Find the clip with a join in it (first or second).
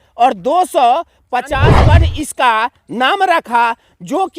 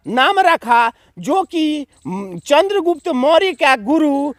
first